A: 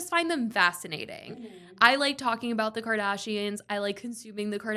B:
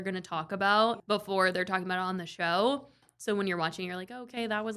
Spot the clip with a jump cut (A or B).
B